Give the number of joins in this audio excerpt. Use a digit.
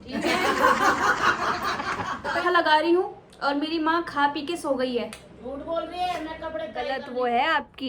2